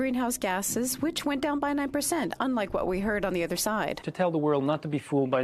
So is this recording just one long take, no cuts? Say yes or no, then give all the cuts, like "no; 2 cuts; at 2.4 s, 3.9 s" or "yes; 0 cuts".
no; 1 cut; at 4.0 s